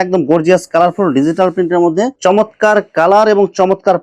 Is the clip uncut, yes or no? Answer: no